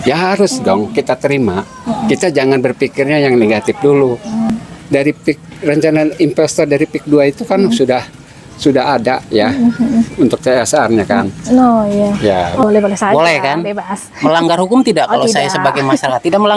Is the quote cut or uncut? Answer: cut